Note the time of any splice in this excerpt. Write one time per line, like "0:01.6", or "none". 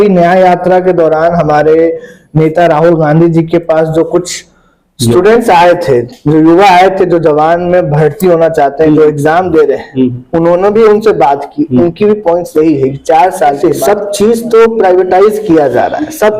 0:13.6